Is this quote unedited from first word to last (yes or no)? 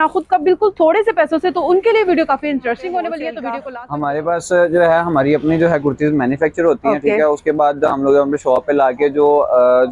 no